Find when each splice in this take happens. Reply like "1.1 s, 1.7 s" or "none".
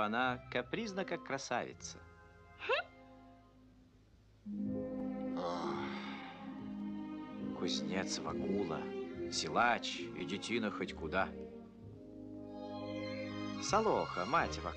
none